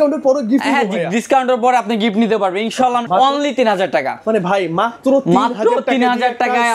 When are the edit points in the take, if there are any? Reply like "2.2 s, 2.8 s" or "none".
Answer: 3.0 s